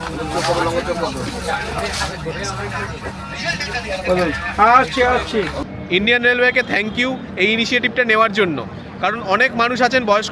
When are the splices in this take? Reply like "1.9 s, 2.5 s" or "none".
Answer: 5.6 s